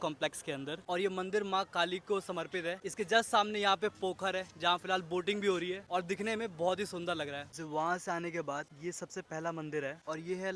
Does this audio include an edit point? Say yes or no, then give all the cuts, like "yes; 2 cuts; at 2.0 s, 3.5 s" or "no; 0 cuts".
no; 0 cuts